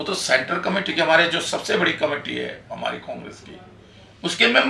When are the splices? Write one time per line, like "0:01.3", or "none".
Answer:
none